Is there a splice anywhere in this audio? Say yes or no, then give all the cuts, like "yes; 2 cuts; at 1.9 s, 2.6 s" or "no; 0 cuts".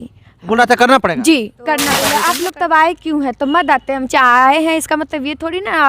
yes; 1 cut; at 2.1 s